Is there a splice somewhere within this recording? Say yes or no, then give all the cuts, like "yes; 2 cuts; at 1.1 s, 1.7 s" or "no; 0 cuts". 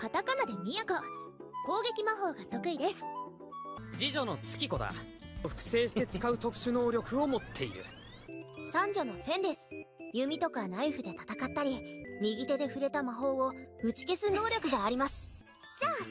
yes; 1 cut; at 2.4 s